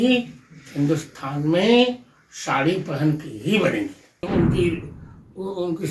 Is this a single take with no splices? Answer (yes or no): no